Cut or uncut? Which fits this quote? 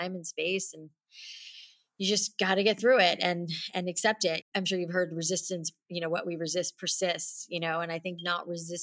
cut